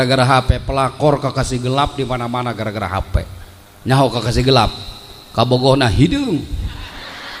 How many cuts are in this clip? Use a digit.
0